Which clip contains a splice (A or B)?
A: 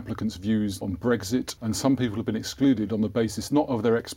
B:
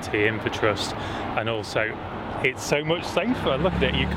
A